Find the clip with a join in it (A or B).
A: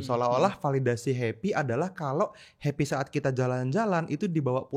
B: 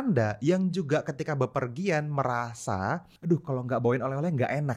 B